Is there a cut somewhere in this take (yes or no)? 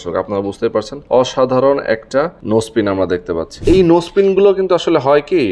yes